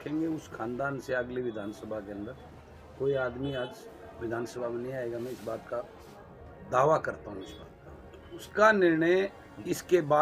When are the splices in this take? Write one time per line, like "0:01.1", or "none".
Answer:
0:08.5

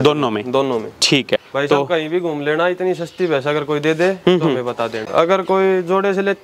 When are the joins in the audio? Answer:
0:01.5
0:05.0

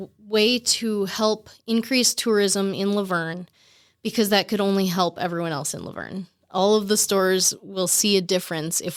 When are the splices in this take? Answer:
none

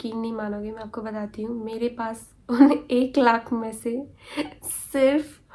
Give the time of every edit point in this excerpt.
none

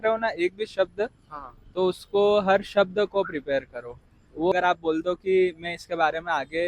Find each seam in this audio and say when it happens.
0:04.5

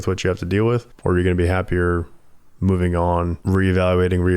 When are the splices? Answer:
0:00.9
0:03.4

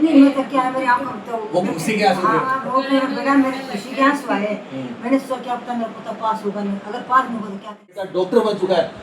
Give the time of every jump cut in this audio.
0:02.6
0:08.1

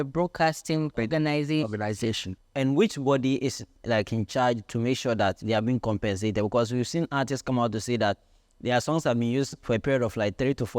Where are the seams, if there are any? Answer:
0:00.9
0:02.3

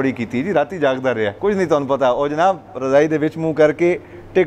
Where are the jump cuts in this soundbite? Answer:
0:01.3

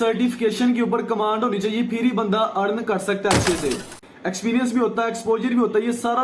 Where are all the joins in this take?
0:04.1

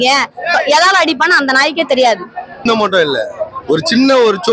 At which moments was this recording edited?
0:02.7

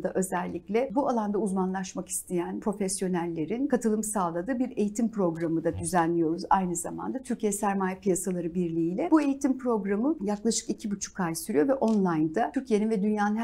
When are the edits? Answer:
0:00.9
0:02.6
0:03.7
0:09.1
0:10.2
0:12.6

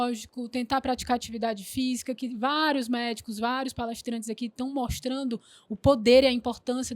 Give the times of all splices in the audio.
none

